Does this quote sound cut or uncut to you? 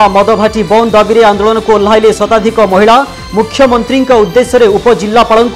uncut